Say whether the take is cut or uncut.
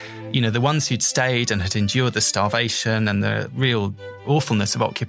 cut